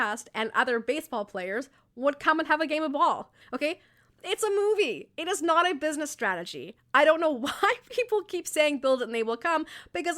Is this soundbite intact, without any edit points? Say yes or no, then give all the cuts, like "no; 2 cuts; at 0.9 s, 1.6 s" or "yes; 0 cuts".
no; 1 cut; at 3.4 s